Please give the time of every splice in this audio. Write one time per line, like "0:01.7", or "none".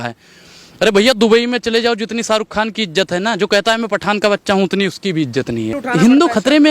0:05.8